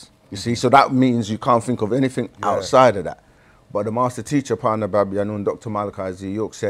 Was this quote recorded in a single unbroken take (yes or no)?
yes